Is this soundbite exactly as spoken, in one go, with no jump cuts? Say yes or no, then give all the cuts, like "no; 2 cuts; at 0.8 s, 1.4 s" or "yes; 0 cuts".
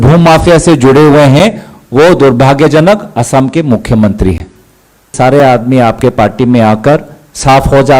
no; 1 cut; at 5.1 s